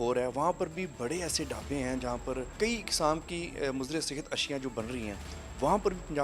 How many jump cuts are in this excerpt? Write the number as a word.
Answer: one